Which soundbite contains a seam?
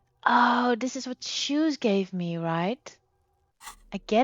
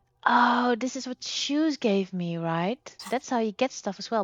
second; 1 cut; at 2.9 s

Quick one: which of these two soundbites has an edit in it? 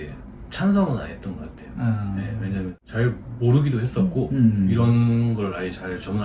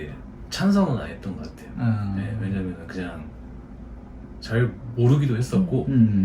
first; 1 cut; at 2.8 s

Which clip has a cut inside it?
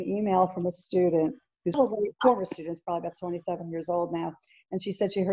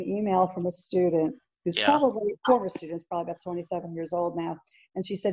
first; 1 cut; at 1.8 s

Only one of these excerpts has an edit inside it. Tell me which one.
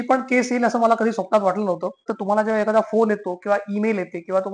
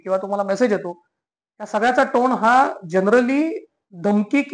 first; 1 cut; at 2.1 s

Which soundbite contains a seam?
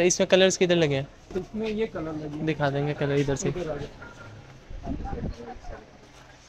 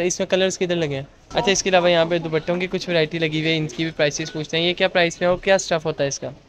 second; 1 cut; at 1.2 s

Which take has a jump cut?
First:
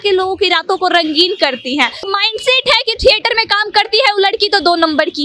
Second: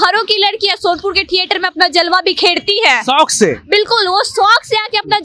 first; 1 cut; at 2.0 s

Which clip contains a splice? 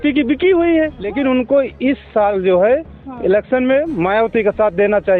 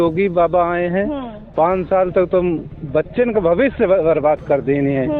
first; 1 cut; at 1.0 s

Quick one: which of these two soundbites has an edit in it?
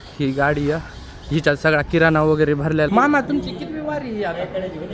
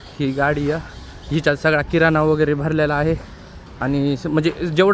first; 1 cut; at 2.9 s

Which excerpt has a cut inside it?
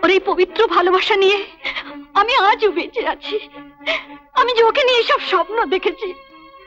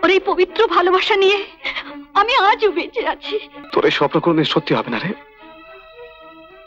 second; 1 cut; at 3.6 s

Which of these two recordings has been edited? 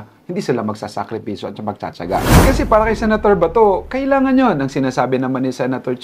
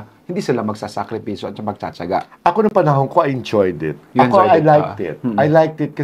first; 1 cut; at 2.4 s

